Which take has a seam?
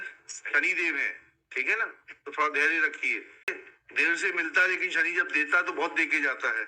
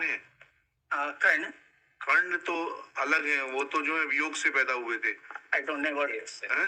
first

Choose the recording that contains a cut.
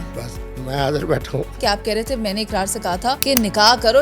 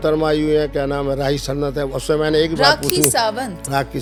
first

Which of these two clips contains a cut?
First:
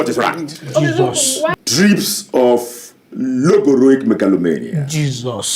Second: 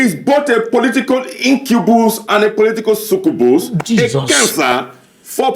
first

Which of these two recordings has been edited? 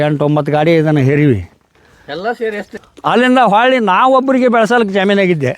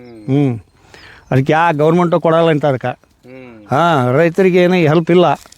first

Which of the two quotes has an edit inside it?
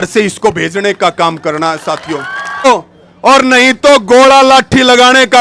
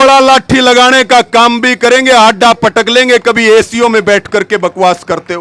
first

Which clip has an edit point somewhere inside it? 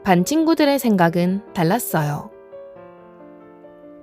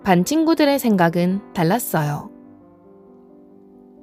first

